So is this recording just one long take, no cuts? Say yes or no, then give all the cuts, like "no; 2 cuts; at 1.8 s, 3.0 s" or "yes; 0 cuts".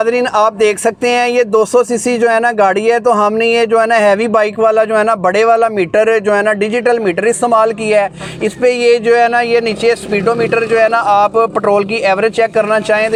yes; 0 cuts